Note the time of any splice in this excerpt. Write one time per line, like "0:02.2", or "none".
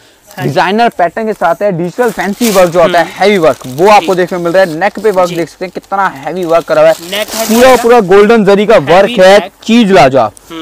0:02.1